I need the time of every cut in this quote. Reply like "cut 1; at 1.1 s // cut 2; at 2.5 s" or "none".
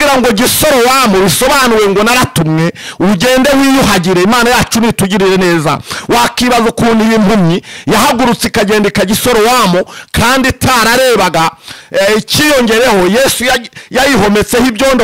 none